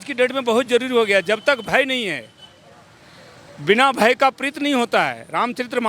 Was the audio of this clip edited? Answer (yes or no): no